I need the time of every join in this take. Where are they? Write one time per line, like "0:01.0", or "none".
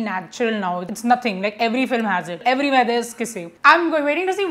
0:00.9
0:02.4
0:03.5